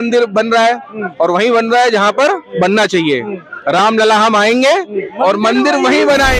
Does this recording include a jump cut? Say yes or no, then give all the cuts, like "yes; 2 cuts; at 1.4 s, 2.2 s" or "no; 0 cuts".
no; 0 cuts